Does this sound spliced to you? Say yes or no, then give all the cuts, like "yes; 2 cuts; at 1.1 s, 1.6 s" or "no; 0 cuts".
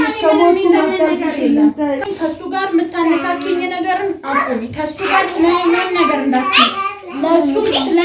yes; 1 cut; at 2.0 s